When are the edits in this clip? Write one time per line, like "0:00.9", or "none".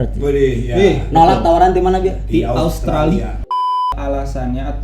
0:03.9